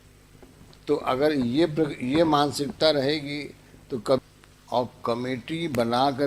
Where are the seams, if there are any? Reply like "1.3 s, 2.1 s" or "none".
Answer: 4.2 s